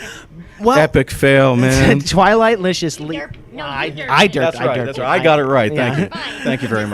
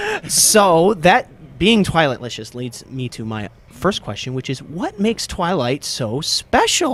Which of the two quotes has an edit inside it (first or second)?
first